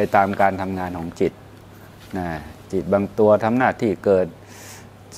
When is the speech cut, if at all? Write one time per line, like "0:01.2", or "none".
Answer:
none